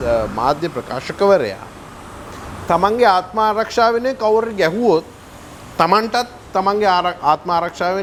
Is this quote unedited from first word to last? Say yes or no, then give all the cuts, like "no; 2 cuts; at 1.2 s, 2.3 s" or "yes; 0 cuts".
yes; 0 cuts